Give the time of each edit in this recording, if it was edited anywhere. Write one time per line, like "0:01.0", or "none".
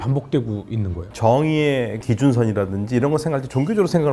0:01.1